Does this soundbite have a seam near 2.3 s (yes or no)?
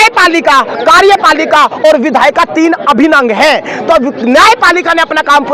no